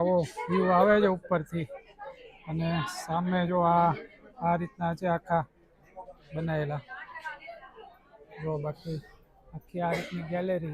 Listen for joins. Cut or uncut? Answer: uncut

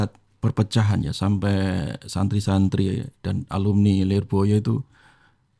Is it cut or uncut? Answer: uncut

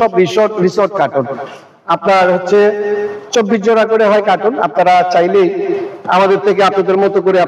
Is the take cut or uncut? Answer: uncut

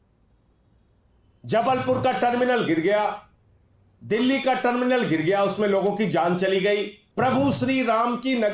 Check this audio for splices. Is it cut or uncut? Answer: cut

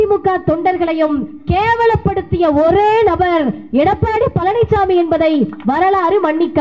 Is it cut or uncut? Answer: uncut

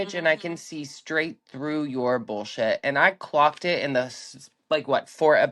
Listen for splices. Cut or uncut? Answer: uncut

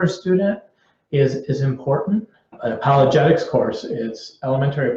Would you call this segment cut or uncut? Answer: cut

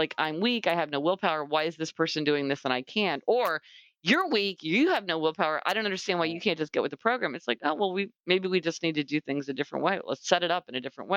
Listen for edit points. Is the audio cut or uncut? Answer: uncut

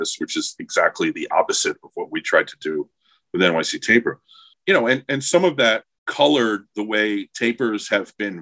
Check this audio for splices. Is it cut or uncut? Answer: cut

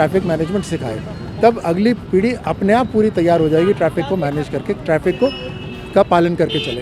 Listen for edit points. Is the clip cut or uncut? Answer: uncut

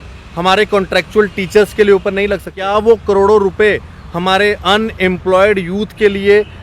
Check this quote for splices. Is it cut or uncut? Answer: cut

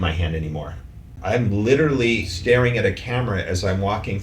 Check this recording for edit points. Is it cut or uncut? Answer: cut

